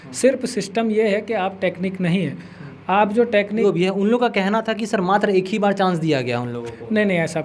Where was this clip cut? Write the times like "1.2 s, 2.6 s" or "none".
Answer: 3.6 s